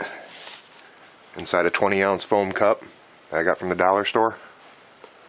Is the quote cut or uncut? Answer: uncut